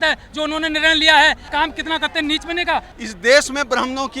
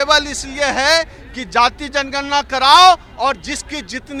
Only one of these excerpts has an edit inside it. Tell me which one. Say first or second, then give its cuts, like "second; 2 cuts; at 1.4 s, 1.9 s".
first; 2 cuts; at 1.4 s, 2.9 s